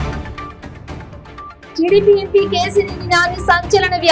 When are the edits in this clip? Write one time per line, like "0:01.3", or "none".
0:01.7